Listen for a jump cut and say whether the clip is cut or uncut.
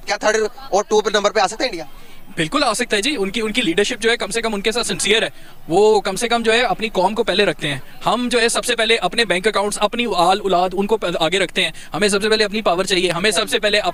uncut